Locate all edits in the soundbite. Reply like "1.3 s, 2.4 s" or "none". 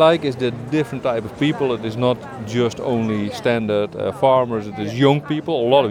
none